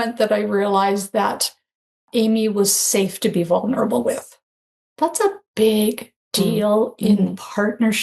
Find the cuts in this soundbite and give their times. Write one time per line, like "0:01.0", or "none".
0:02.1